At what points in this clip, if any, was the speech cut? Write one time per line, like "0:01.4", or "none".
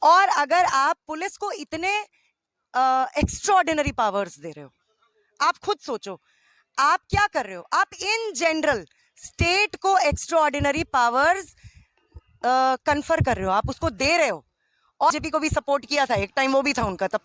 0:15.1